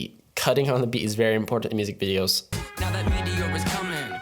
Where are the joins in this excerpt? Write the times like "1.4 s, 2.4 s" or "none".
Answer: 2.5 s